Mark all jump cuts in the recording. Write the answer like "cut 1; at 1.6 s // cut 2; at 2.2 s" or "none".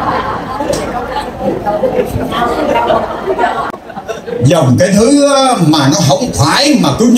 cut 1; at 3.7 s